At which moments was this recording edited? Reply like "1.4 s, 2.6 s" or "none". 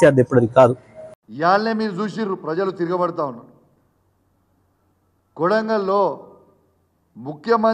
1.2 s

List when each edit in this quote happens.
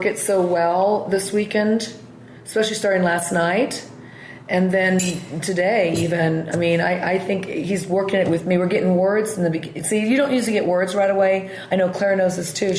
none

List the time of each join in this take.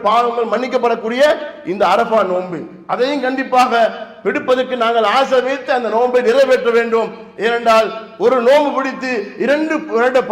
none

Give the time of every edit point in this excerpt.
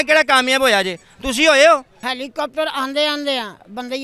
1.9 s

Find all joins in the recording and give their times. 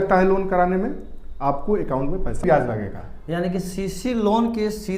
2.4 s

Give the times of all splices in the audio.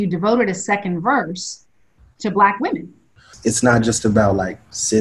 3.3 s

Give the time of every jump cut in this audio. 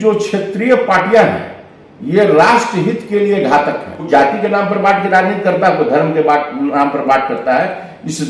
4.1 s

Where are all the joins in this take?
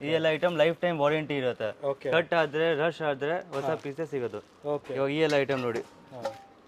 4.9 s

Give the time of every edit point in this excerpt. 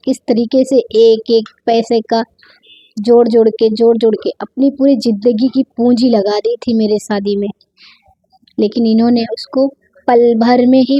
none

